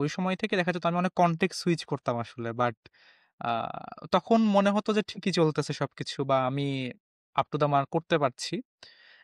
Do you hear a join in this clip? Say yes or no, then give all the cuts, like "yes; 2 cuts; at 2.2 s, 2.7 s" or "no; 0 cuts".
no; 0 cuts